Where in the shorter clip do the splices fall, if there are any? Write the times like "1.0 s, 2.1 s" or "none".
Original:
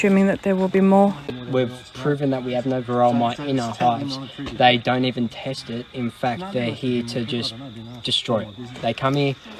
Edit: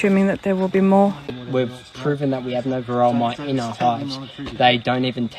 none